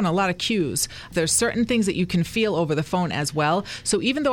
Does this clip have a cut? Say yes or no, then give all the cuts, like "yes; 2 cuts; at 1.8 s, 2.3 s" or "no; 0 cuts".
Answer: yes; 1 cut; at 1.1 s